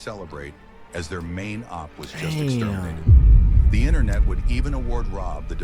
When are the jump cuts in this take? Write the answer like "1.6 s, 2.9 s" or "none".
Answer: none